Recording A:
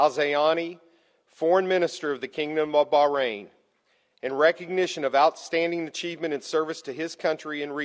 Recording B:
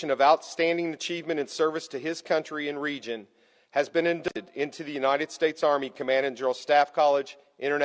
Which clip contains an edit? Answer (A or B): B